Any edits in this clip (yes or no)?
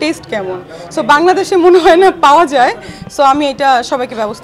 no